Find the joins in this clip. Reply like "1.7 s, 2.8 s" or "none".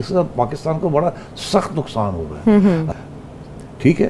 none